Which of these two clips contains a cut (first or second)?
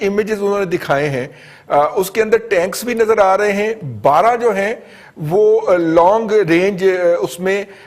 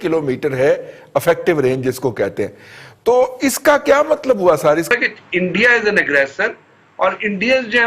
second